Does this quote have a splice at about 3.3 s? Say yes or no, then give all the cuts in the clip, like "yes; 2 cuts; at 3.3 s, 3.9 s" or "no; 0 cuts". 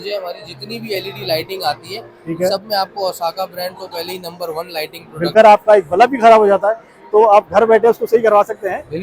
no; 1 cut; at 5.3 s